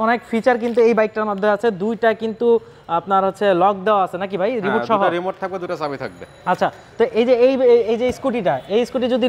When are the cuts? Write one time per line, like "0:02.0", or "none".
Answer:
none